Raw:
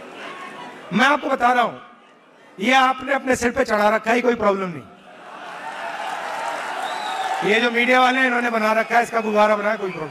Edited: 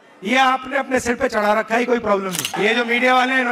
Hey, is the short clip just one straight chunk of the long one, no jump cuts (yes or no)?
no